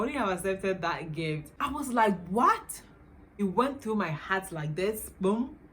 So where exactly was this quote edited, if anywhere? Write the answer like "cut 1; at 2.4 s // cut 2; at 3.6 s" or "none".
cut 1; at 1.5 s // cut 2; at 3.3 s

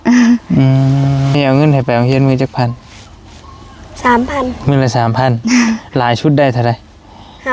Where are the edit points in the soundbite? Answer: cut 1; at 1.3 s

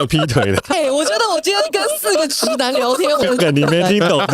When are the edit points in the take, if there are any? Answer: cut 1; at 0.7 s // cut 2; at 3.2 s

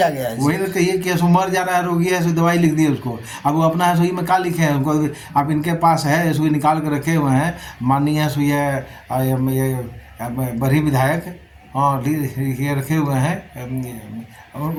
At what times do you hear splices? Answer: none

